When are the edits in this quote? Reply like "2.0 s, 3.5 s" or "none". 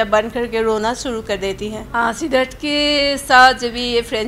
1.9 s